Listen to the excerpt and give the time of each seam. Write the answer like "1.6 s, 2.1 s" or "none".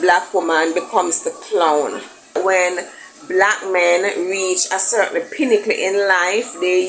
2.3 s